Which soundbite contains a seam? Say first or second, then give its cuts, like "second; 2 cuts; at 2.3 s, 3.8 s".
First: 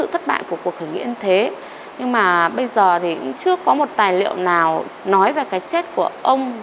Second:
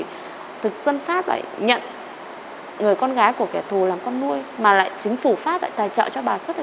first; 1 cut; at 4.8 s